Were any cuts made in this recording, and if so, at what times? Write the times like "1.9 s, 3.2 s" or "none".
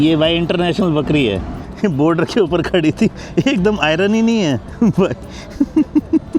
1.6 s, 4.7 s